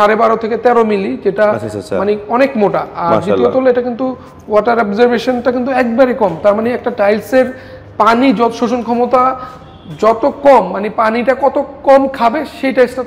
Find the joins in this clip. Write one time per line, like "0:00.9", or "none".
none